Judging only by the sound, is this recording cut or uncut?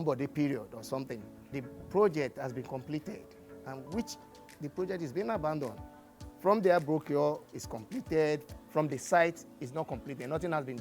cut